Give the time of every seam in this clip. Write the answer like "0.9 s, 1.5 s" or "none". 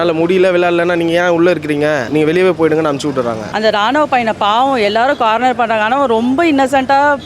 3.5 s